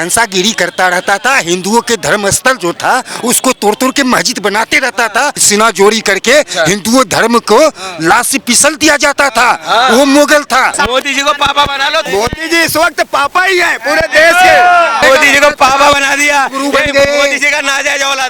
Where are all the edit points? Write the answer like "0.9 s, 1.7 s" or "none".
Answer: 5.4 s, 10.8 s, 12.1 s, 15.0 s